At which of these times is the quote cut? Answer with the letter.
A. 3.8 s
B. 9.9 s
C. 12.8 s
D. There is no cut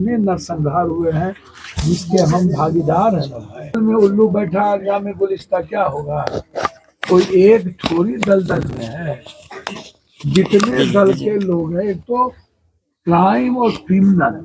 A